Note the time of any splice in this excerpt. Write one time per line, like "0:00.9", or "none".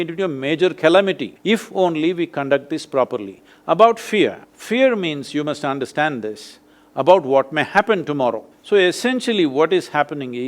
0:01.3
0:04.5
0:08.5

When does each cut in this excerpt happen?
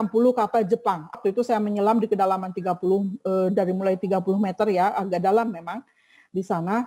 0:01.2

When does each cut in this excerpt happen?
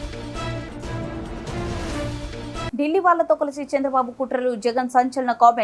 0:02.7

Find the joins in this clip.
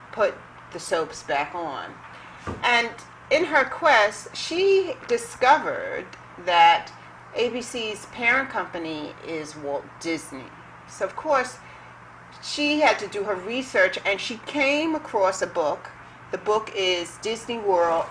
none

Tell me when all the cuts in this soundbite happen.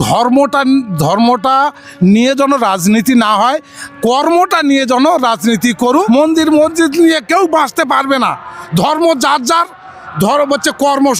0:05.9

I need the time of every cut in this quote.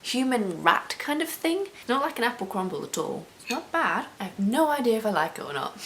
0:01.8
0:03.2

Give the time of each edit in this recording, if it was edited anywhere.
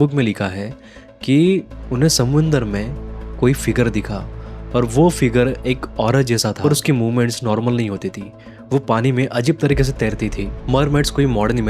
0:10.4

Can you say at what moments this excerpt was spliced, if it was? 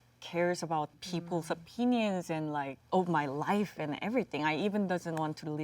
0:00.9
0:02.8

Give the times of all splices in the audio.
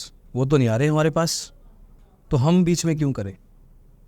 none

